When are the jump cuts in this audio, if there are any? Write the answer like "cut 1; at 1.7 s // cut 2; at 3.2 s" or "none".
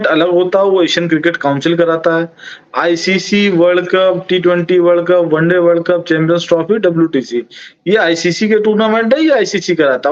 none